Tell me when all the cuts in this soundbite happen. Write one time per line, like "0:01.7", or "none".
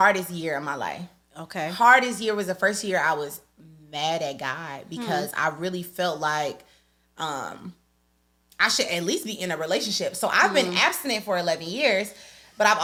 none